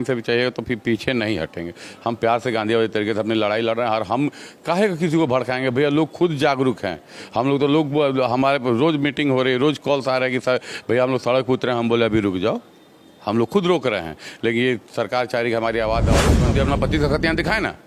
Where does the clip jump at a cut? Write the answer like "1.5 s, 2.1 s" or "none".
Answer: 16.4 s